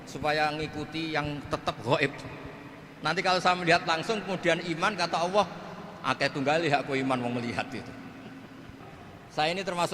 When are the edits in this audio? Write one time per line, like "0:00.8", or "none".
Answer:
0:08.7